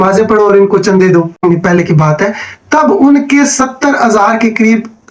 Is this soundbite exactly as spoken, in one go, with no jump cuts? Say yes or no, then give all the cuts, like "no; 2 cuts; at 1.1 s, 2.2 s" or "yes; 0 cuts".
no; 1 cut; at 1.4 s